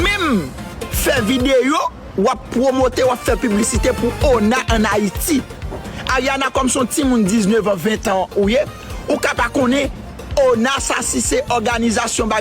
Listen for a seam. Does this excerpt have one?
yes; 1 cut; at 1.6 s

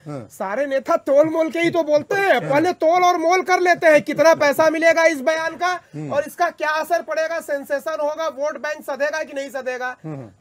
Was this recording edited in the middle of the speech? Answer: no; 0 cuts

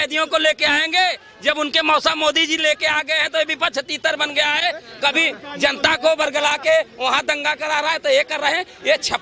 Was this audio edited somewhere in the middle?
no; 0 cuts

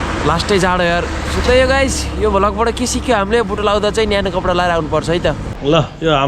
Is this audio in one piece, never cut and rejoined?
no; 1 cut; at 5.4 s

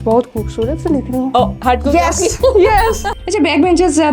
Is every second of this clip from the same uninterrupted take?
no; 1 cut; at 3.1 s

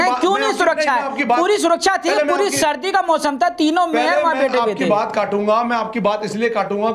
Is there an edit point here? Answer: no; 0 cuts

